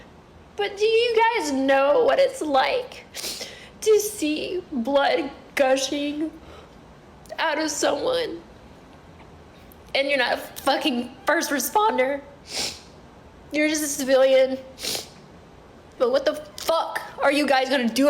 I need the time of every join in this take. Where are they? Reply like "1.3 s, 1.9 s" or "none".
15.9 s